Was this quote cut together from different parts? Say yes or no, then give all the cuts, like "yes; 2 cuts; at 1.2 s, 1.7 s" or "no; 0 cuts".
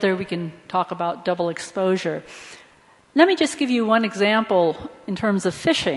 no; 0 cuts